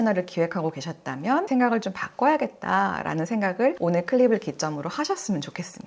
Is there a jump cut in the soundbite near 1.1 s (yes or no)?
no